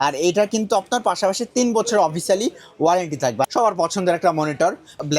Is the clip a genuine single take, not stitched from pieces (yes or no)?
no